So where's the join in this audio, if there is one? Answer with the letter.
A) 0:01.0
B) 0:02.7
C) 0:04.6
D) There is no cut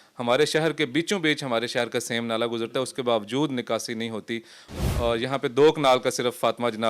C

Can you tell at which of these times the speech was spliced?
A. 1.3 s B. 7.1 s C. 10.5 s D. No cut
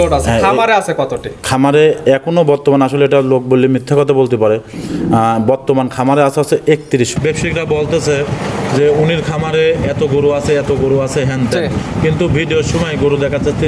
B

